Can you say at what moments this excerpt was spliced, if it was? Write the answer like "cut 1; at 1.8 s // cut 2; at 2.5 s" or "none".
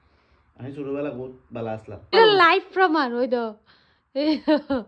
cut 1; at 2.0 s